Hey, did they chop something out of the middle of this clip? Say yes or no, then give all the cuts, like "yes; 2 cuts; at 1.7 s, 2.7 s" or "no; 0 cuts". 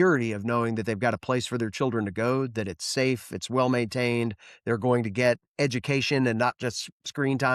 no; 0 cuts